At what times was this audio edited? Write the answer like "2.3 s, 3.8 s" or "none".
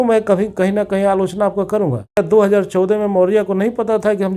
2.2 s